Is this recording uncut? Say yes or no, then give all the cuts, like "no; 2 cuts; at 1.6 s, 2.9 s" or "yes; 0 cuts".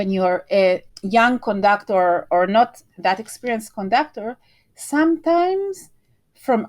no; 1 cut; at 0.9 s